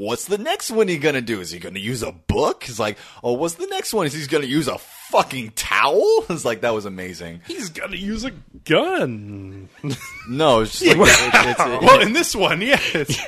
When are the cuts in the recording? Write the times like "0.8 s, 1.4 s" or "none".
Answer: none